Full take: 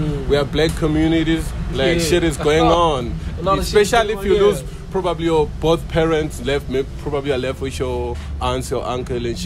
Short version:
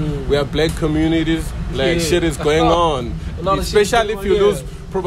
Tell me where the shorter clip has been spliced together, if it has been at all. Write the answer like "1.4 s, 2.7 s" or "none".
none